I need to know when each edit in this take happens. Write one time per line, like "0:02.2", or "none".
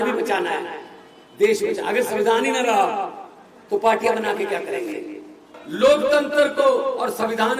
0:05.6